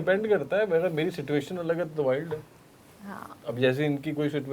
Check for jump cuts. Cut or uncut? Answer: uncut